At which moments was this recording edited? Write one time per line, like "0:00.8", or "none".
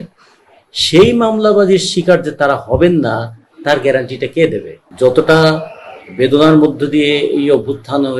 0:04.8